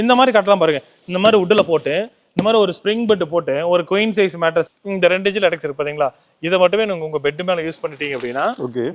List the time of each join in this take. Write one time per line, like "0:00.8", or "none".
0:04.8